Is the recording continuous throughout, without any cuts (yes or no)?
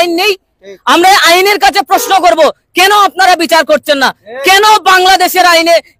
yes